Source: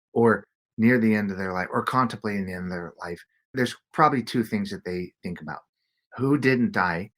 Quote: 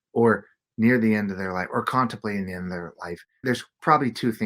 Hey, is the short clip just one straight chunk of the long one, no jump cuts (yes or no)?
no